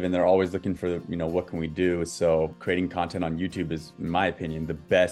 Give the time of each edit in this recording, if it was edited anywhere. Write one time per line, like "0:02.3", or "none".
0:02.6